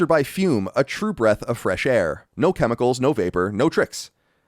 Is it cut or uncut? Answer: cut